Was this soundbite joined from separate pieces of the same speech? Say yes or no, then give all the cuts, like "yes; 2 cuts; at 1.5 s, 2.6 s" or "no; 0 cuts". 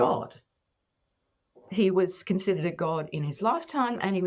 no; 0 cuts